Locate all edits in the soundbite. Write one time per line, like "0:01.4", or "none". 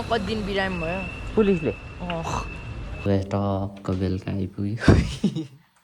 0:03.0

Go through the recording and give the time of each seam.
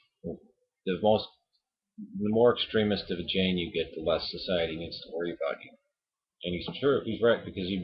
none

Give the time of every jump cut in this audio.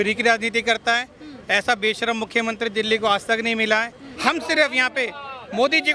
0:04.0

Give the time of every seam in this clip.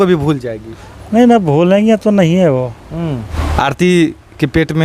0:03.3

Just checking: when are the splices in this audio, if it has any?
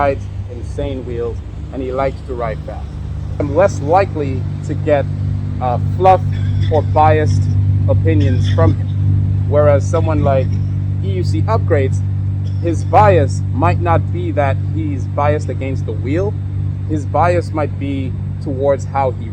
0:03.5

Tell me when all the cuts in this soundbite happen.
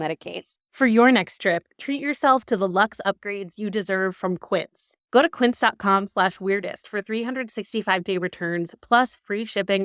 none

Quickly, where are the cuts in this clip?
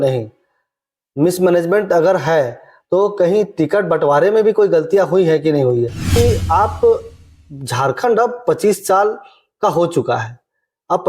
0:06.1

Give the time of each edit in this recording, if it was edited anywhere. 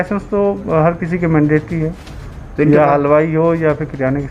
none

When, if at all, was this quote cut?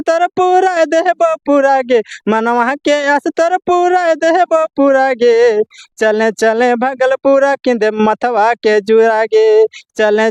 none

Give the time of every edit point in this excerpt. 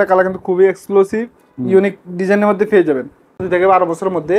0:03.4

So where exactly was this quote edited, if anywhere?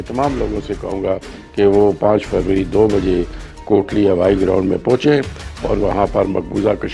none

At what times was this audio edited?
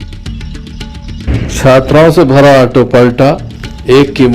0:01.2

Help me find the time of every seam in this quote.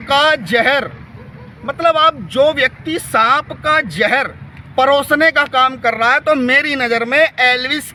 none

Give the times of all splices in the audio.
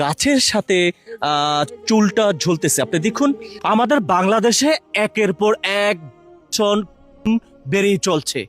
none

